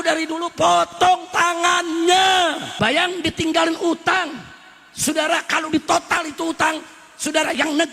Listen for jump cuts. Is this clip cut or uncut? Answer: cut